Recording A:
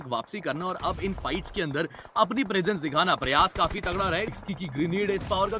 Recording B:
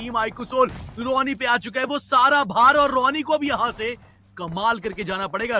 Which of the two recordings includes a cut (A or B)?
A